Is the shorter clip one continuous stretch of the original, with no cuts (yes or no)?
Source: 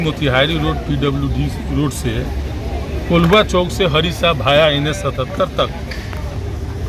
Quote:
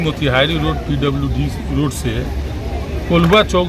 yes